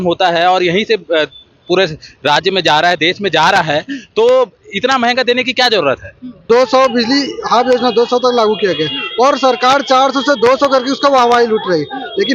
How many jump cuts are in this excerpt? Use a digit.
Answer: 1